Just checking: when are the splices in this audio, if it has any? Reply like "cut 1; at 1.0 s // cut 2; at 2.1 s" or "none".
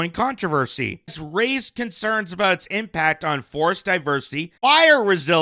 cut 1; at 1.2 s // cut 2; at 4.4 s